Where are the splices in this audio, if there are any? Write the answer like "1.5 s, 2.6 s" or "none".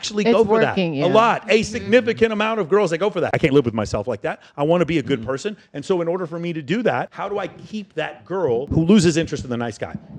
3.3 s, 7.1 s, 8.7 s